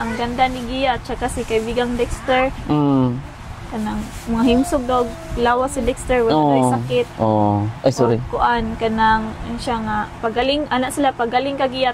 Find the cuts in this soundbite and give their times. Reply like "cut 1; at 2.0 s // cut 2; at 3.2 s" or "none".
none